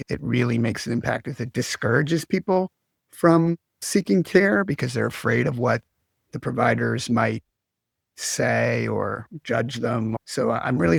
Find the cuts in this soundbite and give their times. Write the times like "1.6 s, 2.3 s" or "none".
none